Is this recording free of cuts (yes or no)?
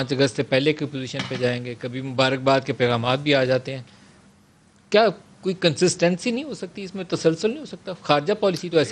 yes